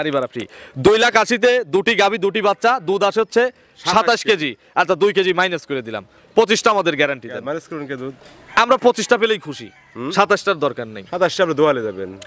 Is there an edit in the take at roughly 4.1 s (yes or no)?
no